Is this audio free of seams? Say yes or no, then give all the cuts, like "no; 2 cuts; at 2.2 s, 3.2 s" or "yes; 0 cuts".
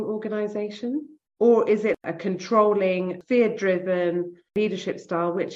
no; 4 cuts; at 1.2 s, 2.0 s, 3.2 s, 4.5 s